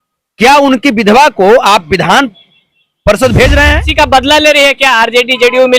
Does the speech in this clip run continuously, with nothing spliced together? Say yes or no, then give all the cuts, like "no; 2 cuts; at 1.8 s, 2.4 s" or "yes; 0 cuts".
no; 1 cut; at 3.8 s